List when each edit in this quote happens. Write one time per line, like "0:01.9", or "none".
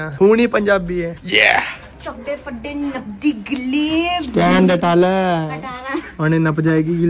none